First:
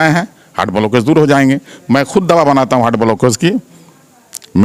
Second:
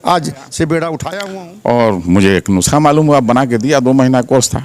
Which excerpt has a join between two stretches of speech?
second; 1 cut; at 1.1 s

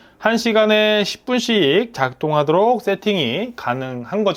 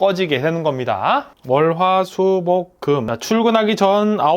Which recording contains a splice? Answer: second; 2 cuts; at 1.3 s, 3.1 s

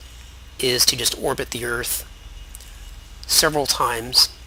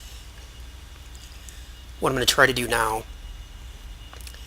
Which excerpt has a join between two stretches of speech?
second; 1 cut; at 1.5 s

